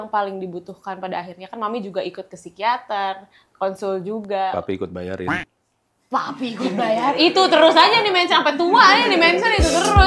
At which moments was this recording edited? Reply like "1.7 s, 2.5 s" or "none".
none